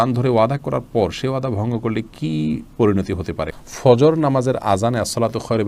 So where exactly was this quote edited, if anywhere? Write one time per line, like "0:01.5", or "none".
0:03.5